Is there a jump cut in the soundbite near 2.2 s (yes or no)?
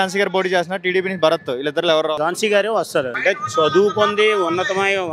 yes